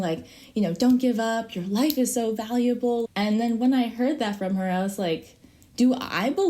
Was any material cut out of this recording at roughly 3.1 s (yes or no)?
yes